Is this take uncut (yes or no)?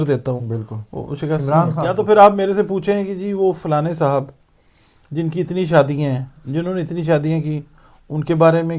no